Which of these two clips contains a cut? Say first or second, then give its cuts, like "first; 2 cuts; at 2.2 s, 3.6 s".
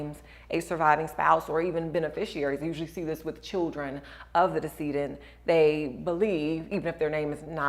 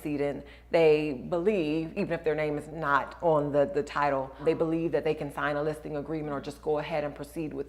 second; 1 cut; at 4.4 s